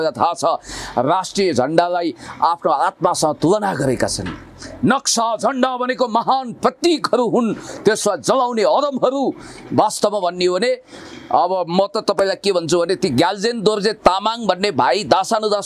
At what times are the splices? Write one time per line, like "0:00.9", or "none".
none